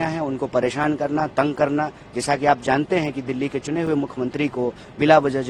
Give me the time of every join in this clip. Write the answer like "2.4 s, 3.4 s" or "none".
none